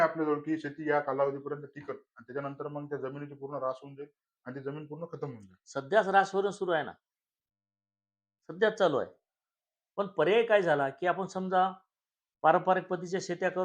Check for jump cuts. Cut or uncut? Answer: uncut